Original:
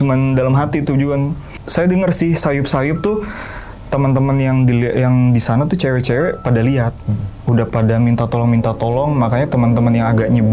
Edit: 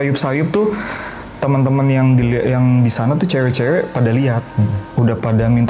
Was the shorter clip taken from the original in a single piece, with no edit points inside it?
yes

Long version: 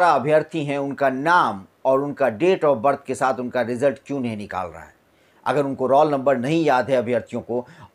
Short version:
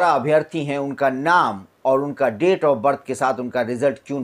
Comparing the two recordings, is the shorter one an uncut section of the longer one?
yes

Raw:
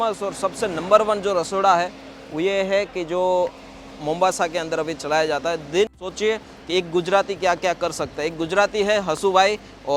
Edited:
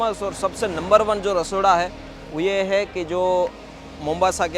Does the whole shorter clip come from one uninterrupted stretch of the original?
yes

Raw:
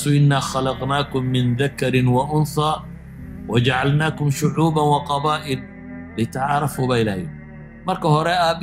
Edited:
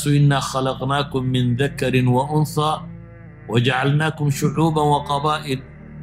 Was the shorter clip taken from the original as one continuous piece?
yes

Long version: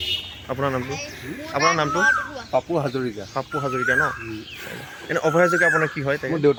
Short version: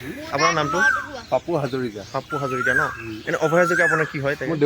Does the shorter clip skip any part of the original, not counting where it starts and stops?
yes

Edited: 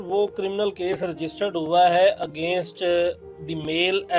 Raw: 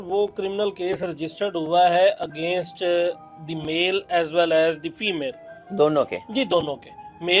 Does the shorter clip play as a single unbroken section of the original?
yes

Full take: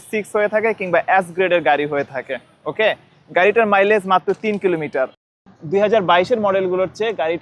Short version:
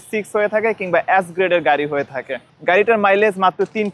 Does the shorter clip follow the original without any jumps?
no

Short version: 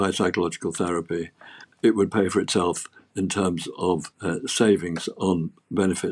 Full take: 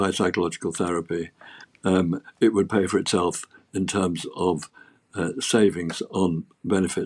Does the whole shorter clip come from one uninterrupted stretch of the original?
no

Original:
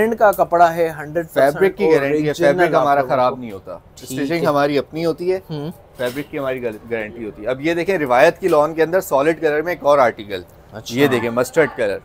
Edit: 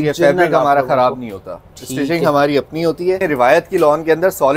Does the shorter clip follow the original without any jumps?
no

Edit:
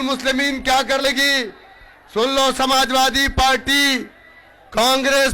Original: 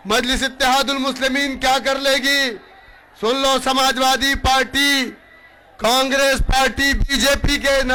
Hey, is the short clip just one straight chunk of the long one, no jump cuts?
no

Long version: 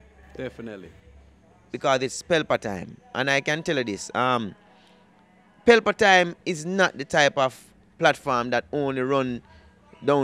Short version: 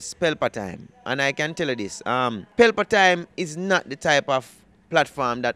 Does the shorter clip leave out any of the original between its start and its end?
yes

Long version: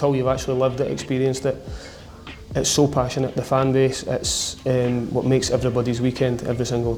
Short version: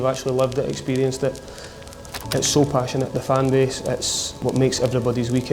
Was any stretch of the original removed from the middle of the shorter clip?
yes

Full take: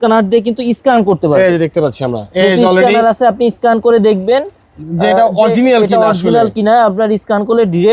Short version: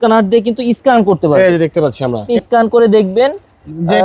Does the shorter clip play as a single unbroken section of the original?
no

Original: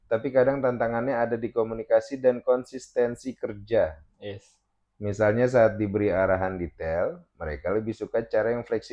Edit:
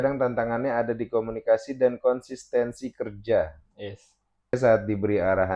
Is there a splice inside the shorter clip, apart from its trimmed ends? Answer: yes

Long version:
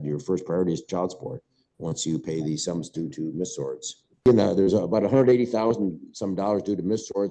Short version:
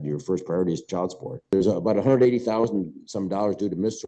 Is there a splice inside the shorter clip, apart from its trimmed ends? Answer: yes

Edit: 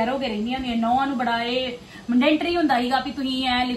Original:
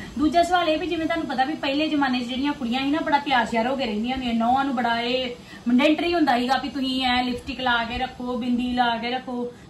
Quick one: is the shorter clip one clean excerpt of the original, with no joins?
yes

